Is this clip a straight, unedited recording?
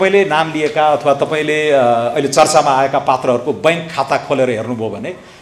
yes; 0 cuts

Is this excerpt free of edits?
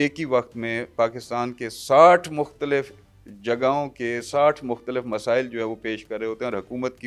yes; 0 cuts

